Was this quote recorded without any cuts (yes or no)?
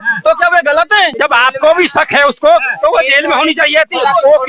no